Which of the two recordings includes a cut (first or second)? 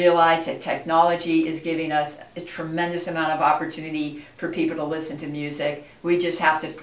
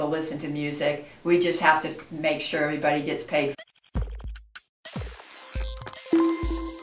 second